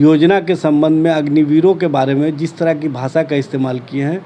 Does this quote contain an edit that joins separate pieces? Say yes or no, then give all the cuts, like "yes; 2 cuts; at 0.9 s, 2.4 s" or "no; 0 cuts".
no; 0 cuts